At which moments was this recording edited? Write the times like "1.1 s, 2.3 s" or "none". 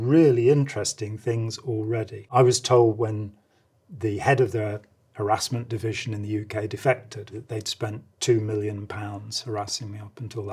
2.2 s, 7.4 s